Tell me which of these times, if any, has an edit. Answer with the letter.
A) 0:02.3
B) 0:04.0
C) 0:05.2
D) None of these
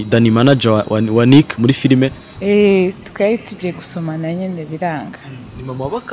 A